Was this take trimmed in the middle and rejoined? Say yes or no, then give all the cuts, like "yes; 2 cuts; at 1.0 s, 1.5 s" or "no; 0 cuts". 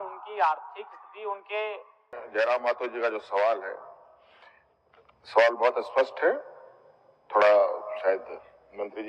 yes; 1 cut; at 2.2 s